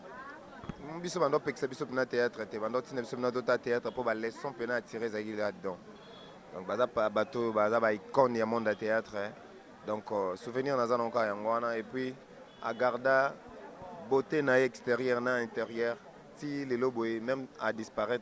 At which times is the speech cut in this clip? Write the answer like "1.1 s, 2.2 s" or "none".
none